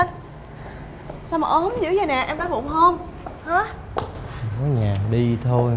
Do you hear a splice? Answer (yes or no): no